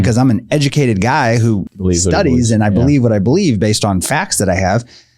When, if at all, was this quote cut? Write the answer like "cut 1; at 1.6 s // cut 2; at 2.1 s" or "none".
cut 1; at 1.6 s

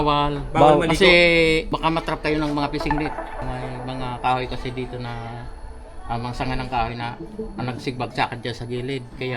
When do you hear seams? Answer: cut 1; at 1.7 s // cut 2; at 3.4 s

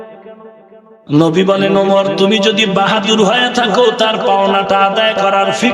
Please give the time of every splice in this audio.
cut 1; at 0.9 s

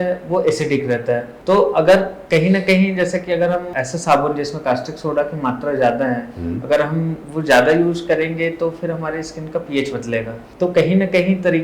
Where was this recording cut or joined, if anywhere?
cut 1; at 1.3 s // cut 2; at 3.7 s // cut 3; at 10.4 s

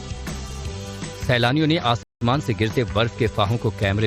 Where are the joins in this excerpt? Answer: cut 1; at 1.0 s

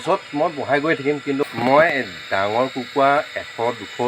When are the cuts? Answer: cut 1; at 1.4 s

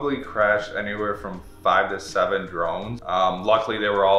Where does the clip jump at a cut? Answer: none

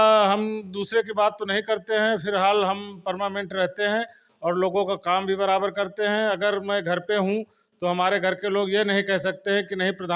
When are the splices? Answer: none

